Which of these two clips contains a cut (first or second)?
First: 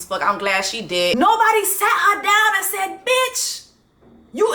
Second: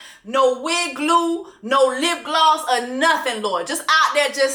first